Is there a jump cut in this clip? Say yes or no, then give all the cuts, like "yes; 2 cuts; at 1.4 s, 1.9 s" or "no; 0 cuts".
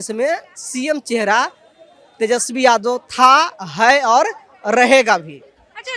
no; 0 cuts